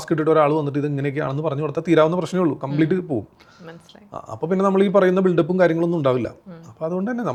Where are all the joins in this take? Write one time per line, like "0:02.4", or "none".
none